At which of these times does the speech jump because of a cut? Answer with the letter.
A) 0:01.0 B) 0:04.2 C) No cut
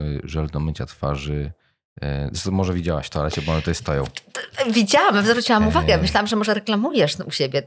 C